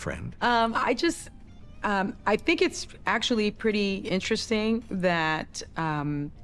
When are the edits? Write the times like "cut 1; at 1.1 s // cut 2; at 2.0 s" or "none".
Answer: none